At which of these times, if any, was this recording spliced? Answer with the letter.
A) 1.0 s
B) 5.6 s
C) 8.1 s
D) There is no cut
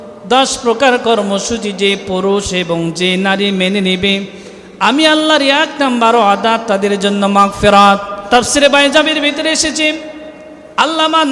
C